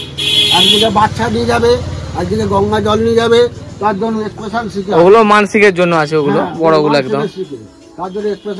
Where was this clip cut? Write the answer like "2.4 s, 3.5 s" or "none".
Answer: none